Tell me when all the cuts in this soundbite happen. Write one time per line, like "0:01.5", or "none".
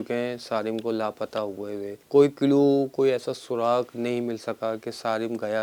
none

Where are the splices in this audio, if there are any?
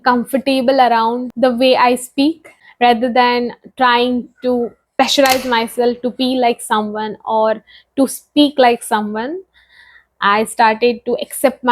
0:01.3
0:04.8

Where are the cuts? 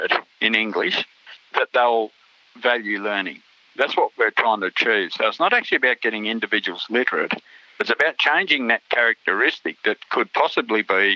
none

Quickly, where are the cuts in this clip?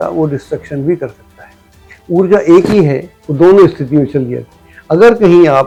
none

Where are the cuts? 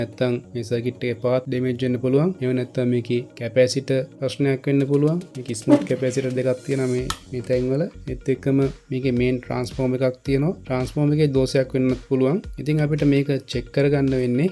0:01.5
0:02.4
0:03.4
0:04.2

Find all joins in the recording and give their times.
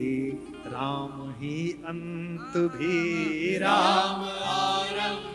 none

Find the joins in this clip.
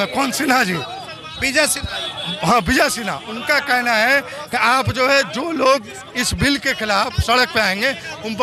none

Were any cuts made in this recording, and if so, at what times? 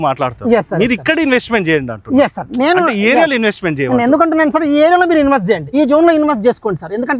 0:05.6

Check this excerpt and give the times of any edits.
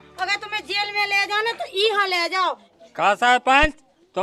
0:02.8

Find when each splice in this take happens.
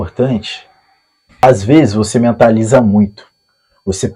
0:01.4

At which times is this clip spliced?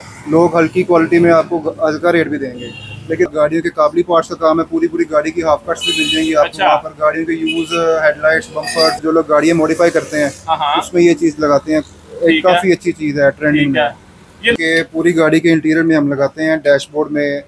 0:03.3
0:09.0
0:14.6

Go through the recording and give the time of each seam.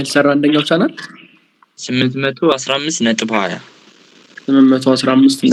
none

